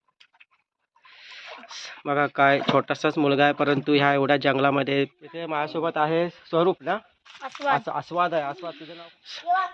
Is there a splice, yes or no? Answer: yes